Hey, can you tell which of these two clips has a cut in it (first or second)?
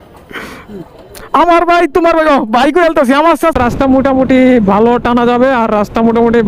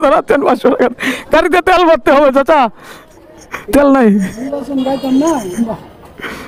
first